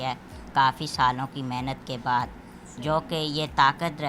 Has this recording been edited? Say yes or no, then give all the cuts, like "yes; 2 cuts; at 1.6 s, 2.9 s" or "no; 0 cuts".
no; 0 cuts